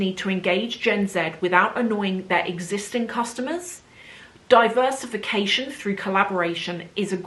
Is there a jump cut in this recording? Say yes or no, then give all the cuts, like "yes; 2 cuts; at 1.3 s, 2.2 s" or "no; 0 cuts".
no; 0 cuts